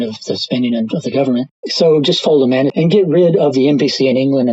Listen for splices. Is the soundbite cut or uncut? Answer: cut